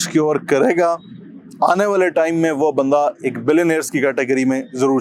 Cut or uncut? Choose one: uncut